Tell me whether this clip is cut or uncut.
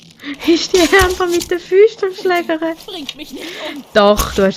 uncut